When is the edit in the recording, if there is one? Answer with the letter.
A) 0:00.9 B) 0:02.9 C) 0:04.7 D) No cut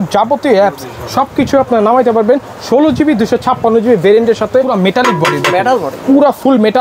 C